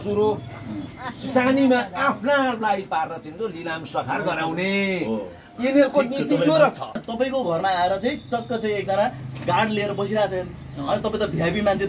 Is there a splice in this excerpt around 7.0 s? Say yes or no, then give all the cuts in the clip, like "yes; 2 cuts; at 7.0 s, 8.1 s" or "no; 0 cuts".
yes; 1 cut; at 7.0 s